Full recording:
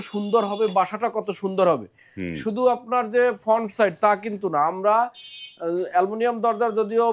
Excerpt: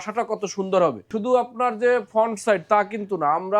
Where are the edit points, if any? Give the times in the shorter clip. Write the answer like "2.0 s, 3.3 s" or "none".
1.1 s